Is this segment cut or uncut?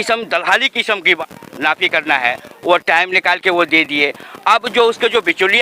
cut